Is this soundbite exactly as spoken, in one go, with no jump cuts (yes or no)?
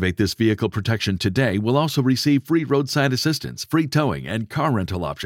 yes